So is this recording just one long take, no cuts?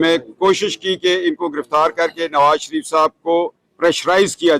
yes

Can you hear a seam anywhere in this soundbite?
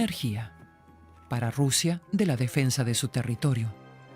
no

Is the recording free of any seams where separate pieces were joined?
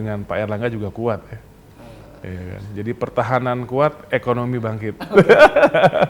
yes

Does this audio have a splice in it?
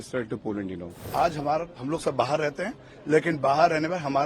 yes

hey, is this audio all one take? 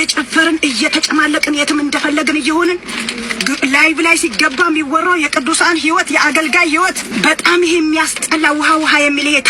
no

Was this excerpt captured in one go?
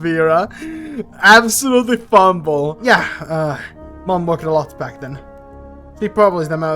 no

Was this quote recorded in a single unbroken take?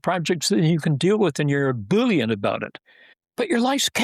yes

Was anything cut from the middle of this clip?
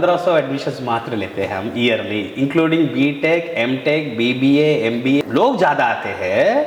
no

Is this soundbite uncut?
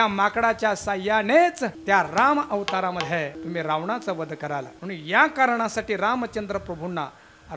no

